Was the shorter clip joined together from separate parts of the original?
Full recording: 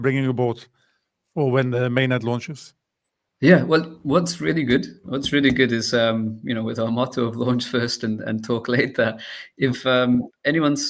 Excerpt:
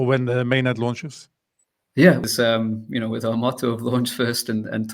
yes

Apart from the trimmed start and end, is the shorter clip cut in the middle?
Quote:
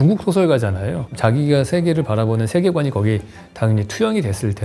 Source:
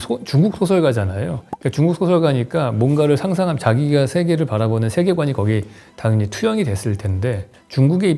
yes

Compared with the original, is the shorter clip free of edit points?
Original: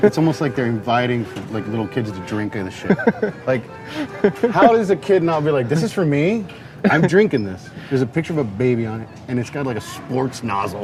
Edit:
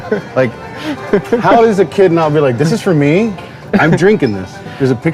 yes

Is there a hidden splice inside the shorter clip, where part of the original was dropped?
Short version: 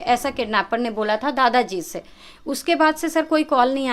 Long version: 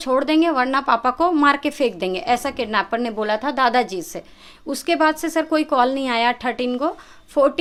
no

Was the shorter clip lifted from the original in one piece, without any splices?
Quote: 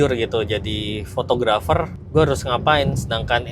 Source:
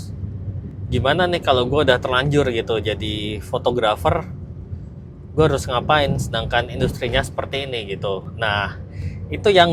no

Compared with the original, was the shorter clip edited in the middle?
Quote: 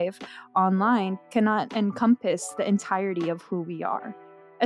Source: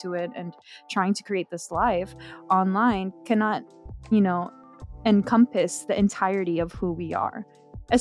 yes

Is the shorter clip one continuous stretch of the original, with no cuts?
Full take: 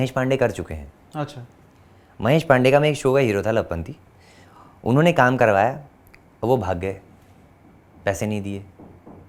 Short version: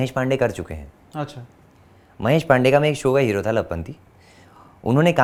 yes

